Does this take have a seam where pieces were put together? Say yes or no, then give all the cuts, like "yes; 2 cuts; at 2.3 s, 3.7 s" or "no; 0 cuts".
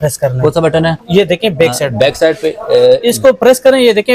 no; 0 cuts